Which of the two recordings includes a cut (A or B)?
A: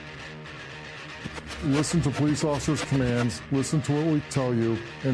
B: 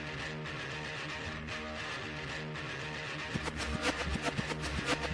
A